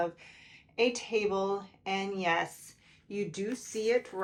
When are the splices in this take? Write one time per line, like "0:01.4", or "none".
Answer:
none